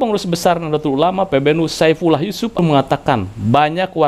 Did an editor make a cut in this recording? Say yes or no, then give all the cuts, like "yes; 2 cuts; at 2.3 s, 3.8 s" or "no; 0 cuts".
yes; 1 cut; at 2.6 s